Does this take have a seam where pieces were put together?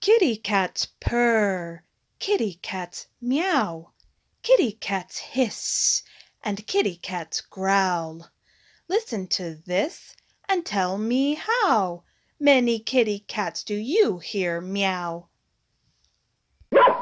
no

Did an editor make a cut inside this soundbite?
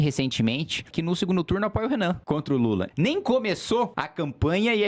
yes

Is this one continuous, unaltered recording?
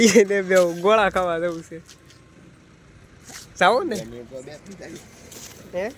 yes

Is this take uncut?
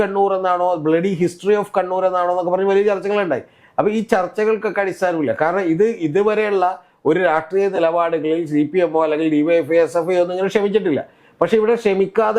yes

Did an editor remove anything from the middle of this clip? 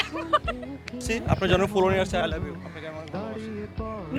yes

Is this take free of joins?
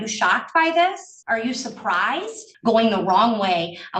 no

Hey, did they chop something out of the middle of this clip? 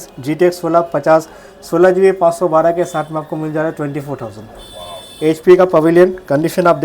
no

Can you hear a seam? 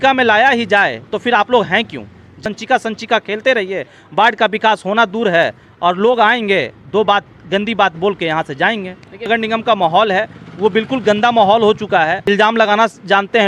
yes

